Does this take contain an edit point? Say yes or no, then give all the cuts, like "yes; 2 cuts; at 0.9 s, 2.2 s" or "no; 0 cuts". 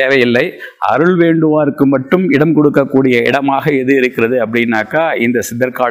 no; 0 cuts